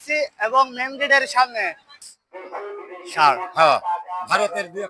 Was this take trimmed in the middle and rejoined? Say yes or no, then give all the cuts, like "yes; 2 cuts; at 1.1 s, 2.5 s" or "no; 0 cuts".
yes; 1 cut; at 2.1 s